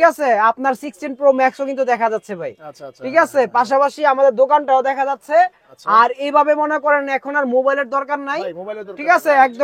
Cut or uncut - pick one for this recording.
uncut